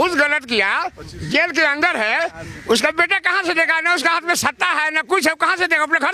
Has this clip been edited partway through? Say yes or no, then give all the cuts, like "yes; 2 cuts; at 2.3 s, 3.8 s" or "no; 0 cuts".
no; 0 cuts